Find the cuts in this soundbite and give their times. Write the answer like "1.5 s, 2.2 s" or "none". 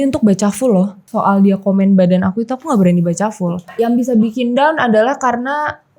1.0 s, 3.7 s